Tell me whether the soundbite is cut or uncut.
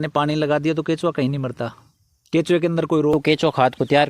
cut